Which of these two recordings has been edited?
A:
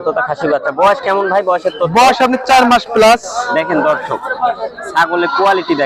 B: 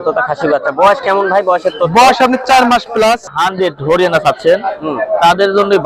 B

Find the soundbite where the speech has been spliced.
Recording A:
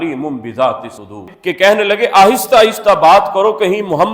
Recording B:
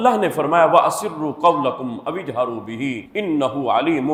A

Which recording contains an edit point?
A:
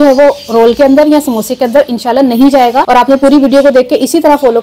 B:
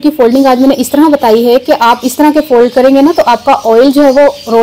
A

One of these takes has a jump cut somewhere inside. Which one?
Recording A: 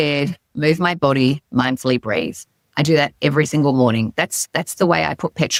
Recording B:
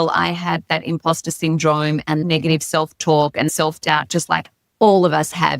B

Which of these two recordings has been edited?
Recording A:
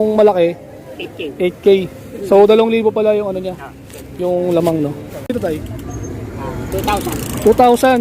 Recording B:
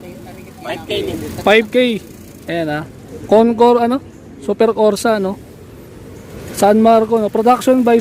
A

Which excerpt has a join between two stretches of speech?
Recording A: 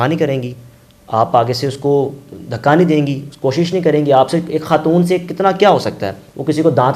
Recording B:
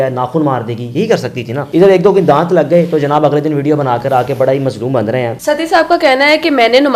B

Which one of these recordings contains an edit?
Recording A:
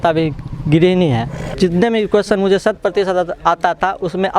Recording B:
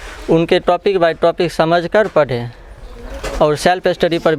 A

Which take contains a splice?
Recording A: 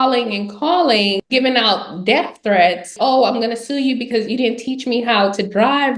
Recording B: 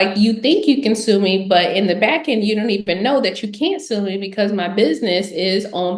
A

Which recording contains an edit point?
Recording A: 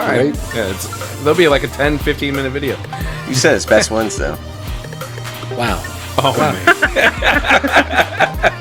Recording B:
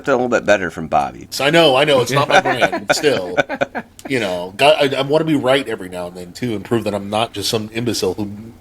B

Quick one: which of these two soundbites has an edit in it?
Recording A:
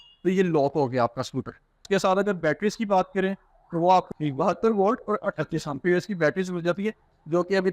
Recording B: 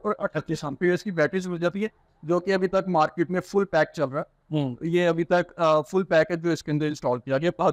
A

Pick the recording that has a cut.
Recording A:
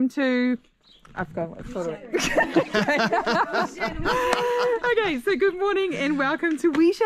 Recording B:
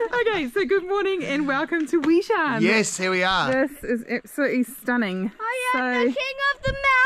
B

